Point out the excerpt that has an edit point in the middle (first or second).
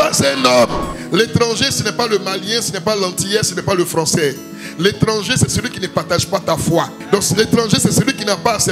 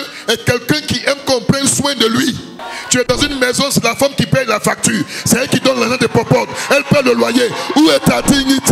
first